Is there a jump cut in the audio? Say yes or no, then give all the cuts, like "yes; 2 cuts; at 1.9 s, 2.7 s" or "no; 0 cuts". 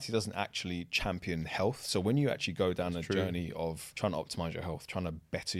yes; 1 cut; at 3.9 s